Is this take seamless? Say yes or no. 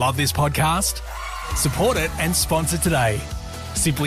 yes